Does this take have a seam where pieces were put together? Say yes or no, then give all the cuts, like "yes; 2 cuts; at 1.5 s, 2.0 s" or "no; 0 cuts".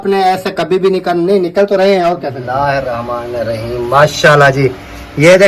yes; 1 cut; at 2.4 s